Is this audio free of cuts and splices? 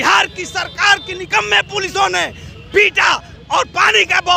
yes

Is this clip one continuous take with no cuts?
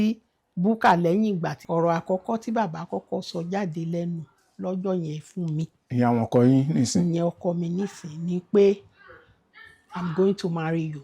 no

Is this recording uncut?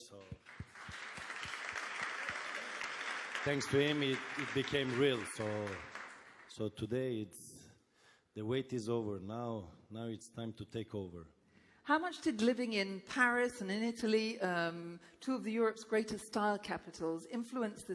no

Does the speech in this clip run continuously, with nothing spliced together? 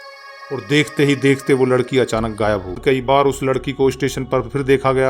no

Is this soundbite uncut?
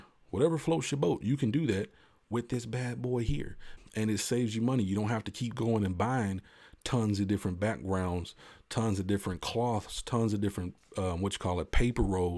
no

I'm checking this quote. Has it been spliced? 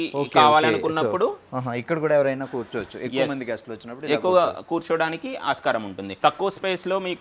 yes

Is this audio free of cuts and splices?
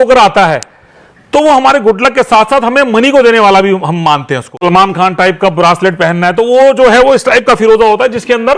no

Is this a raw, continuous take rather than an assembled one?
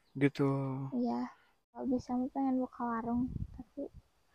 no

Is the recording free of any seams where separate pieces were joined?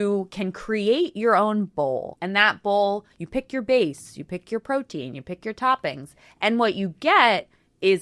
no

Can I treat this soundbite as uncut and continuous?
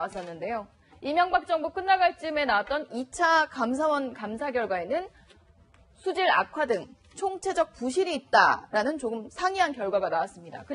yes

